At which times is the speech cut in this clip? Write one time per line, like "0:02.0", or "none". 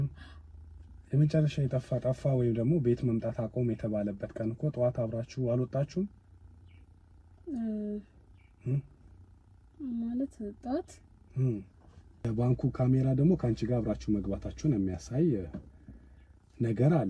0:12.1